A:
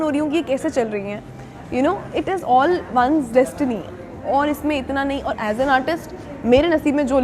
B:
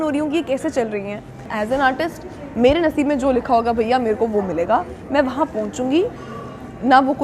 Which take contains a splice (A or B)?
B